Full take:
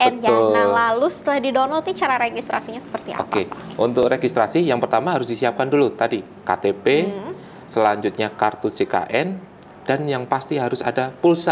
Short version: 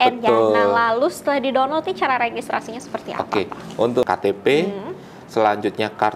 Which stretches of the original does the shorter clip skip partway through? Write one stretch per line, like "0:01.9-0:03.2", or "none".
0:04.0-0:06.4